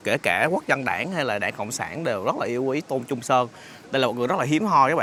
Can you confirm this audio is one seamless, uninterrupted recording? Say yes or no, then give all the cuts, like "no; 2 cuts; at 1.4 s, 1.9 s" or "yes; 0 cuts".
yes; 0 cuts